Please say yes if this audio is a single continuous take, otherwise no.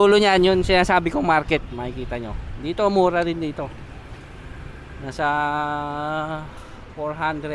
yes